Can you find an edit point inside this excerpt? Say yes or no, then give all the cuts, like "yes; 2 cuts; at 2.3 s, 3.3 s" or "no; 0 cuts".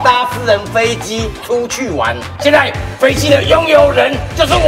yes; 1 cut; at 2.3 s